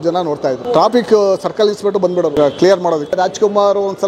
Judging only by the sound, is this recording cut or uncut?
cut